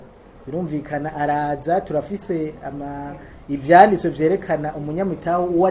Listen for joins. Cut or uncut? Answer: uncut